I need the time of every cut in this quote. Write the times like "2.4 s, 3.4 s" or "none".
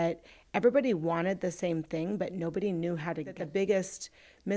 3.4 s